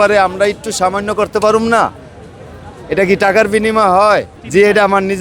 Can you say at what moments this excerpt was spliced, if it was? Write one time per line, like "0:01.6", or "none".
none